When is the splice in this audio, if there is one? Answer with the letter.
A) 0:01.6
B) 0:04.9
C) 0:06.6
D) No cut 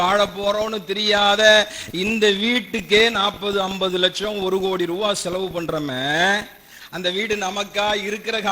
D